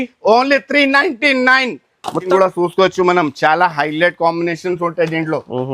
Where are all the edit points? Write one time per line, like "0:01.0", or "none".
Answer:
0:02.3